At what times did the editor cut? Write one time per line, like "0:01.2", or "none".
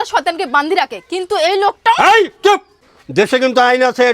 0:02.8